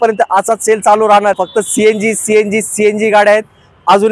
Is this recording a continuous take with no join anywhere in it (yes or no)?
no